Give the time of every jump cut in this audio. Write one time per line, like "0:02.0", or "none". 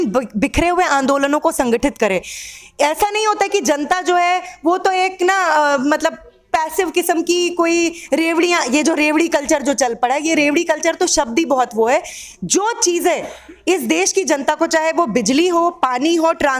none